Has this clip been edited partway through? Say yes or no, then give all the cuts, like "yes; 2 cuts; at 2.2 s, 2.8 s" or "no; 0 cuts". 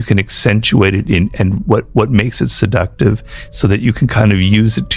no; 0 cuts